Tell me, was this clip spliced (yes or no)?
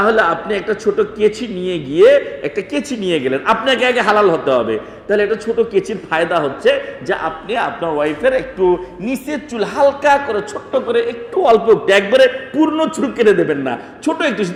no